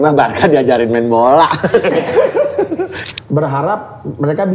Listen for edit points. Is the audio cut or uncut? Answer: cut